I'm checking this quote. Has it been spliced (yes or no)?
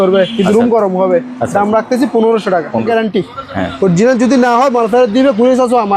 yes